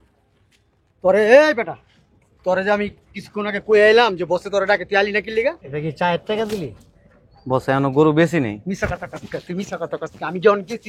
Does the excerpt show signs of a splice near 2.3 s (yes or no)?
no